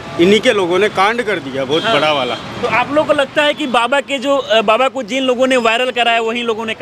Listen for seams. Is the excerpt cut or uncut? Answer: uncut